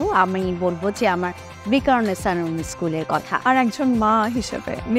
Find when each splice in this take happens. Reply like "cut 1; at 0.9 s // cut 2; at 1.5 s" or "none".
cut 1; at 3.3 s